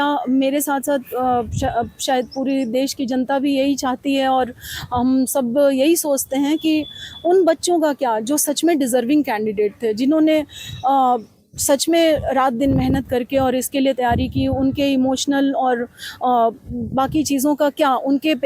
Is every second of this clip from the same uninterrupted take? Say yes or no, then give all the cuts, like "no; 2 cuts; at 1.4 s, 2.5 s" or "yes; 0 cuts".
yes; 0 cuts